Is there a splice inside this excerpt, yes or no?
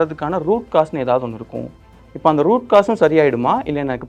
no